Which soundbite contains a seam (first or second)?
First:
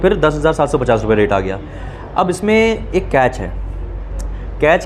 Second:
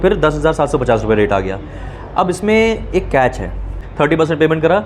second